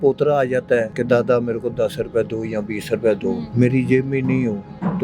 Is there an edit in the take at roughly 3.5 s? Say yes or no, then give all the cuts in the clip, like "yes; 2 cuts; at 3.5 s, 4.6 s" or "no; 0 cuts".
yes; 2 cuts; at 0.9 s, 3.5 s